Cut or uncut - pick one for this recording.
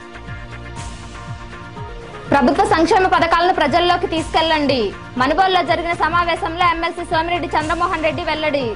cut